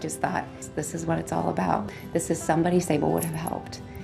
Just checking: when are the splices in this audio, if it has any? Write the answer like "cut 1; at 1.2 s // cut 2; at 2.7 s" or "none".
none